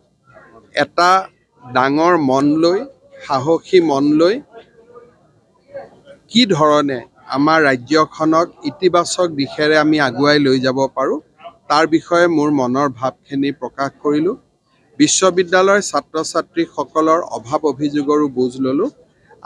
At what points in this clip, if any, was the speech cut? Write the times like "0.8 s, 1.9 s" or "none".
none